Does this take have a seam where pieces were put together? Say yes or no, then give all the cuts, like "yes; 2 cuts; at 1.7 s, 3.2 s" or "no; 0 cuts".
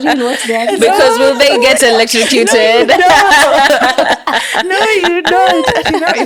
no; 0 cuts